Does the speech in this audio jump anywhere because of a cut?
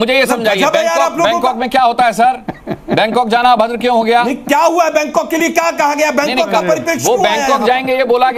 no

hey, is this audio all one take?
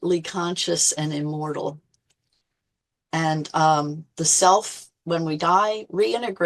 yes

